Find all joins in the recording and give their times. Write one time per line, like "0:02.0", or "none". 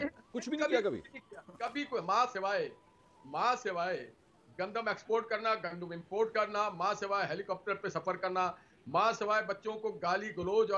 none